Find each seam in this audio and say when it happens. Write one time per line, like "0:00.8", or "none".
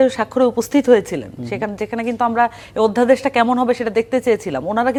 none